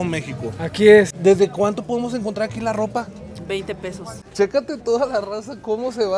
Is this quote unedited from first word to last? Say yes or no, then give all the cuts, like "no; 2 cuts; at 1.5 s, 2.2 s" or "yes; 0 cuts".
no; 2 cuts; at 1.1 s, 4.2 s